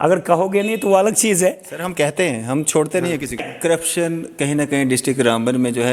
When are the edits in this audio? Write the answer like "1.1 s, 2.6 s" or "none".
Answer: 3.4 s

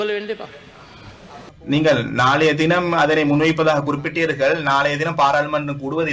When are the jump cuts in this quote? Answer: 1.5 s

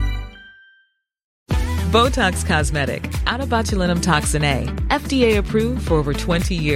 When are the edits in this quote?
none

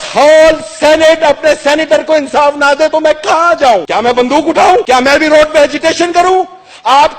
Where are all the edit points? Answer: none

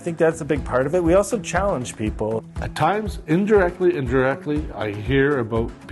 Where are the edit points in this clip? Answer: 2.4 s

